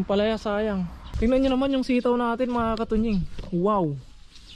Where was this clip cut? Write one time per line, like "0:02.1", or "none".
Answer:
0:01.0